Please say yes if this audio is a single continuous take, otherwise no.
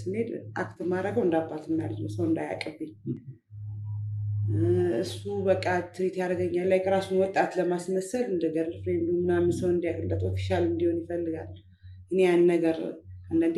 yes